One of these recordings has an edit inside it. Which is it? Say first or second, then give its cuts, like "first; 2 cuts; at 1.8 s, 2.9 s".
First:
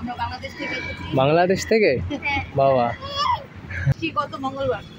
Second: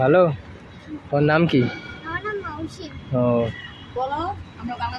first; 1 cut; at 4.0 s